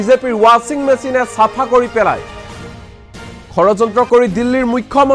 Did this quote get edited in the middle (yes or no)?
yes